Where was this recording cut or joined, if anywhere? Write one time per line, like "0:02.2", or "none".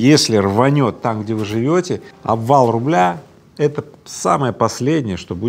0:02.1